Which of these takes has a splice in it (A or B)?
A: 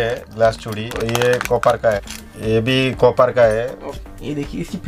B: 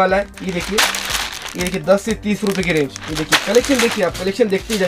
A